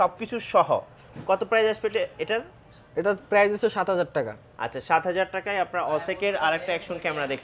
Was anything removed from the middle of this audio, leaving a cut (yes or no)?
no